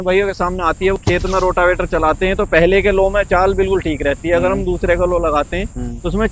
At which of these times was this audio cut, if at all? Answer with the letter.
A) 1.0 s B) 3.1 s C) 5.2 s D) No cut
A